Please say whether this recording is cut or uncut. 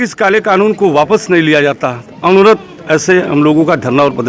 uncut